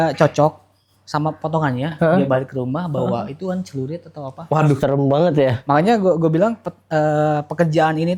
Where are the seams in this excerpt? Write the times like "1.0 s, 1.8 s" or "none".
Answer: 5.6 s